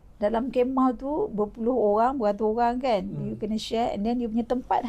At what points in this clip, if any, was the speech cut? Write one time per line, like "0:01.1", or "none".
none